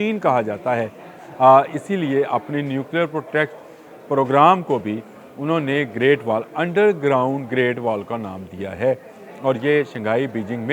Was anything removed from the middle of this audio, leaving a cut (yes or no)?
no